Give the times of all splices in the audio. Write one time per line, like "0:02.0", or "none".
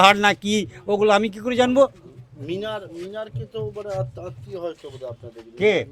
none